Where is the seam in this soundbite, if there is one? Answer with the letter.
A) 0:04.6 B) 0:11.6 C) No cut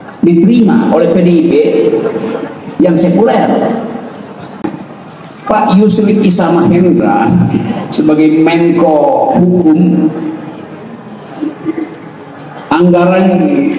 A